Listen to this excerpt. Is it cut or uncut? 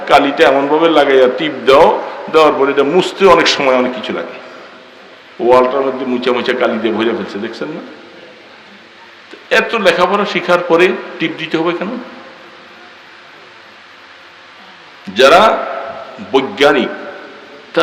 uncut